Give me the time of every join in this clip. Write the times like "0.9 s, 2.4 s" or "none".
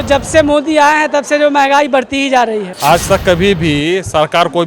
2.7 s